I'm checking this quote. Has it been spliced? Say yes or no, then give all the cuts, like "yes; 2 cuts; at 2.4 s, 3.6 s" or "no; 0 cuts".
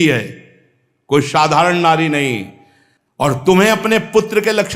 no; 0 cuts